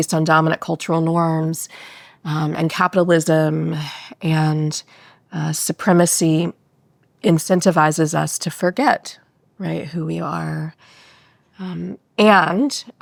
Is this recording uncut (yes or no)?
yes